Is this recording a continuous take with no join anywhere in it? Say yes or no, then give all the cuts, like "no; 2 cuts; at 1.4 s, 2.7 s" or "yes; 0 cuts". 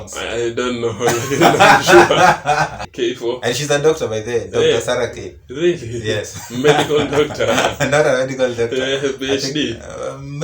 no; 1 cut; at 2.8 s